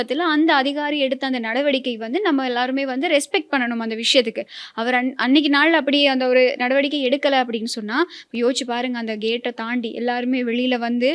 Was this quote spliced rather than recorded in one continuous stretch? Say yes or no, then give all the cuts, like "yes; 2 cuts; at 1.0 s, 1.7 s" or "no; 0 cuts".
no; 0 cuts